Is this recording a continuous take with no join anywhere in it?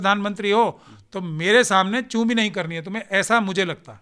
yes; 0 cuts

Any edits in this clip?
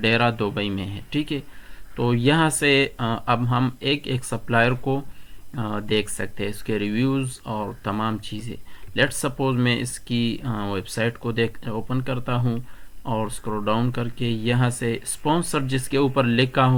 no; 0 cuts

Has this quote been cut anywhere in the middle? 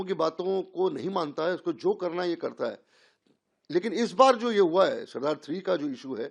no; 0 cuts

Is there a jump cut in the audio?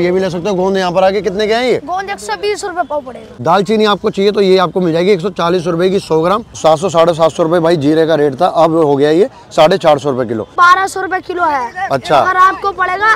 yes; 3 cuts; at 3.3 s, 6.6 s, 10.5 s

